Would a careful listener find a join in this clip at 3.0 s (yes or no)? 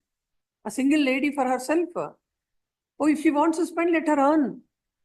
no